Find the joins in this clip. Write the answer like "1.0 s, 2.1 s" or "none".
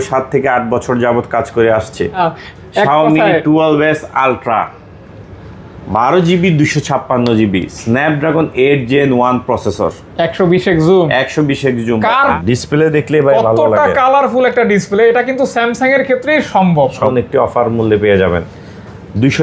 2.2 s, 12.4 s, 17.1 s